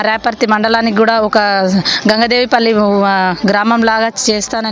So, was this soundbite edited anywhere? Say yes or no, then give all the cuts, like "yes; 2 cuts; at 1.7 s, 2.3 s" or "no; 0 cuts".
no; 0 cuts